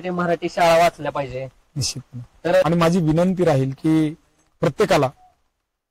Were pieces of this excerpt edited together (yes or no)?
yes